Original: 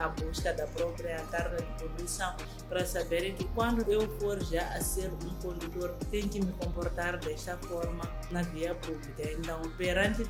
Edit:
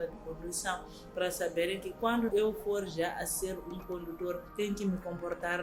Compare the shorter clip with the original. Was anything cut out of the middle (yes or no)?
no